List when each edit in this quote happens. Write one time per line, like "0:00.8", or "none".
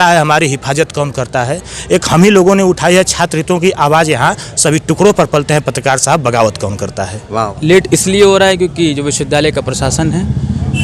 0:07.5

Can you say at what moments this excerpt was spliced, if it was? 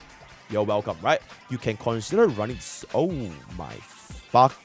0:01.3

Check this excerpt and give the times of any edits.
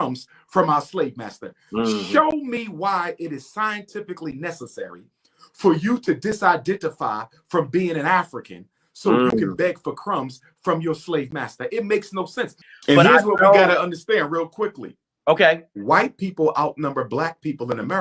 0:12.6

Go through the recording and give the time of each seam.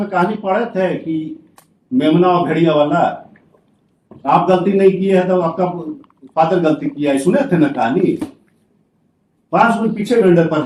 none

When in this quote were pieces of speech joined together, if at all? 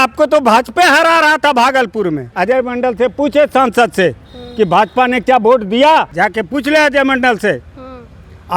0:02.3
0:06.1

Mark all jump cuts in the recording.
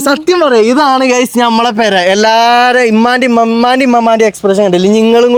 none

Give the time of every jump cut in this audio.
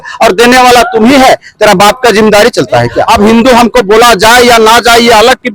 0:03.1

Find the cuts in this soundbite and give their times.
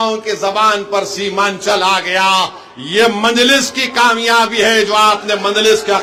none

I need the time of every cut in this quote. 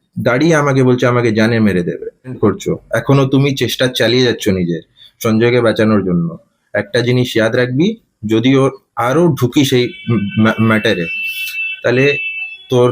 0:02.4

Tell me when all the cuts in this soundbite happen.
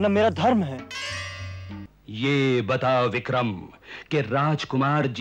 0:01.9

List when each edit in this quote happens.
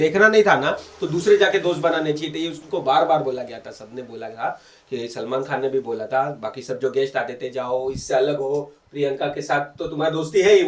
none

